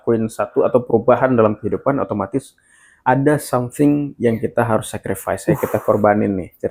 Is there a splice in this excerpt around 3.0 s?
no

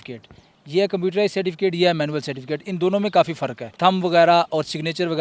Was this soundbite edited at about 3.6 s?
yes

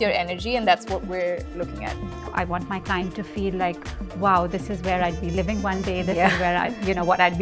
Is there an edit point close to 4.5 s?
no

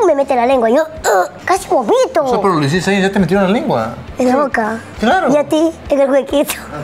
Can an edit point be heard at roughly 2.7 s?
no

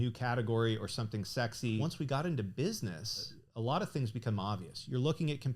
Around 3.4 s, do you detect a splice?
yes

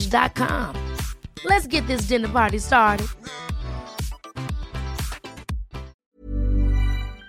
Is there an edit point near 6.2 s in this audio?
yes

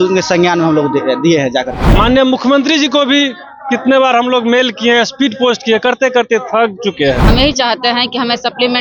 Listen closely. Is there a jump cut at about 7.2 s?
yes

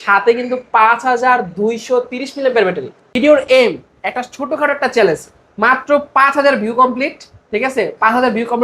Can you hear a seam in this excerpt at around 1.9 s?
no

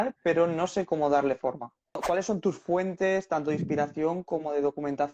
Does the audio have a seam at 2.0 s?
yes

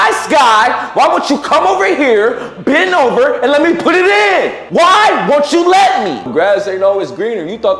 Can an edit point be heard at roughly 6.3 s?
yes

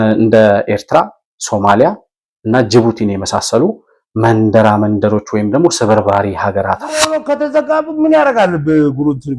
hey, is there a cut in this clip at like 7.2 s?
yes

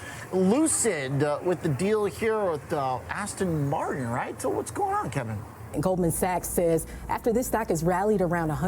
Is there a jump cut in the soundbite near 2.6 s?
no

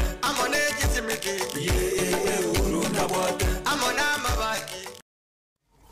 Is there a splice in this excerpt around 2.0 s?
no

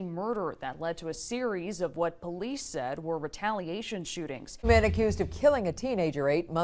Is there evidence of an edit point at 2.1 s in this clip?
no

